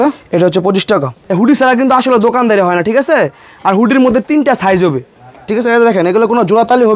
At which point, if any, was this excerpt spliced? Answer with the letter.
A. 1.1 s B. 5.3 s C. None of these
A